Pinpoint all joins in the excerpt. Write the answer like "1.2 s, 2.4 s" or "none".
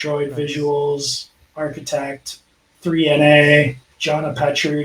3.9 s